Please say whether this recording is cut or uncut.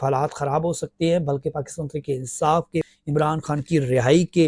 cut